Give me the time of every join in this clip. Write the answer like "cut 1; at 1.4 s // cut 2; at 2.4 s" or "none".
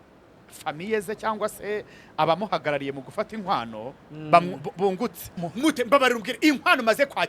cut 1; at 5.5 s